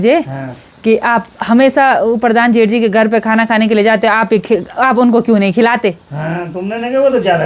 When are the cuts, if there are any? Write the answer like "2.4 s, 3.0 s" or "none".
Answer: none